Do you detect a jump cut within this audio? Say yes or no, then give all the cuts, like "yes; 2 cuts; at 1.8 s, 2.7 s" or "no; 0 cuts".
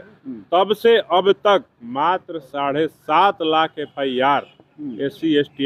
no; 0 cuts